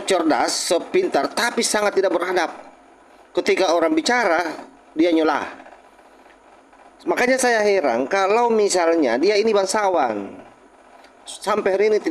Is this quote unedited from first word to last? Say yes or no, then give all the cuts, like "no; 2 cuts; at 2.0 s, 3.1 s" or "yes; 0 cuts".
yes; 0 cuts